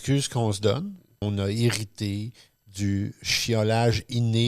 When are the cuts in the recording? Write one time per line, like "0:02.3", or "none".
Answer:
0:01.1